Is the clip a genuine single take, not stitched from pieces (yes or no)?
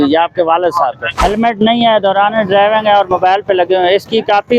no